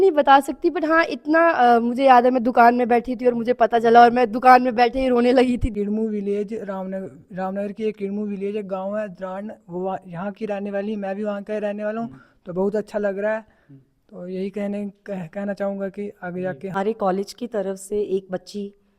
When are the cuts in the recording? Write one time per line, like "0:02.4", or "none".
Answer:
0:05.7
0:16.8